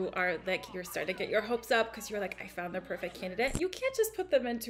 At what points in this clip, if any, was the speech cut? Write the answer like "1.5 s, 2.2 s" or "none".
3.5 s